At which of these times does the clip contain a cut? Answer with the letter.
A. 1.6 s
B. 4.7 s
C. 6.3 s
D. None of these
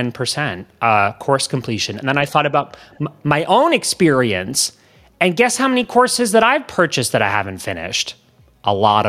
D